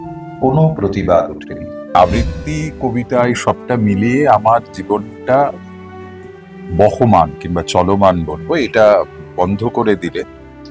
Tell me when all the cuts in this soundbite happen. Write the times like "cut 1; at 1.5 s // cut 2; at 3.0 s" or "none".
cut 1; at 1.9 s